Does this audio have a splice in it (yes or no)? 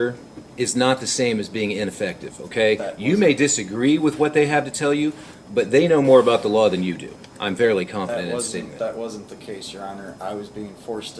no